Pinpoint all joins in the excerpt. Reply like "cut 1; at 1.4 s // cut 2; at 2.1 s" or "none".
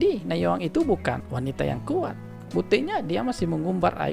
cut 1; at 1.2 s // cut 2; at 2.3 s